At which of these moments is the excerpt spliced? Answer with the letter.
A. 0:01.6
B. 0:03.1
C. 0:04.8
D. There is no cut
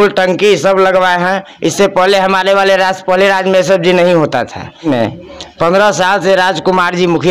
C